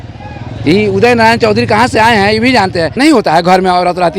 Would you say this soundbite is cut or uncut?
cut